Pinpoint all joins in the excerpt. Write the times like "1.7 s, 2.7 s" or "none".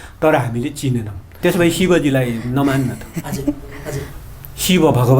1.2 s